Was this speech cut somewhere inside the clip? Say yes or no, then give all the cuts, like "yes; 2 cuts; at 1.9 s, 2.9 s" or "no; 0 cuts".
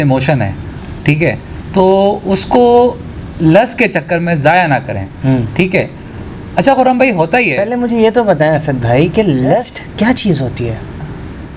no; 0 cuts